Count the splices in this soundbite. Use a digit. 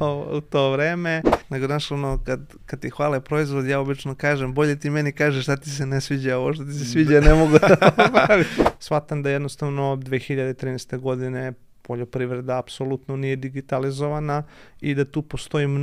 2